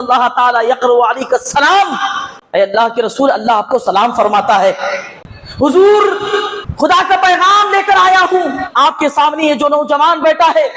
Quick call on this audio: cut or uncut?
cut